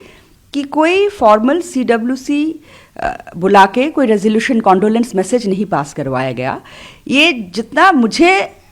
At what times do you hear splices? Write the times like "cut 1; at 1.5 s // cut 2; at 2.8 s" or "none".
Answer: none